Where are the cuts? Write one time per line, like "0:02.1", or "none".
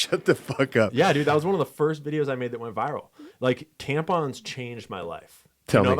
none